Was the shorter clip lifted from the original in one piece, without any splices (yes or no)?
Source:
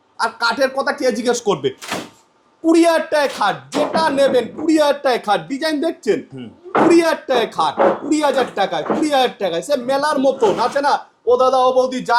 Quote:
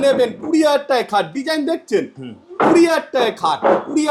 yes